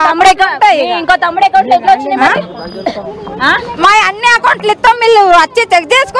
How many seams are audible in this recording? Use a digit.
0